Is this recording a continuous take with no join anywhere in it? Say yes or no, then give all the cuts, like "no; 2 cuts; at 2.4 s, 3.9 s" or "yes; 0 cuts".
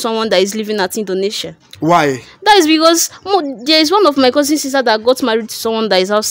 yes; 0 cuts